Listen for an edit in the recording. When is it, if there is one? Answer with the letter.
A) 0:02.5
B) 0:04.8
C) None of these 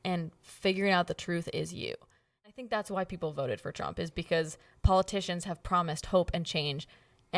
A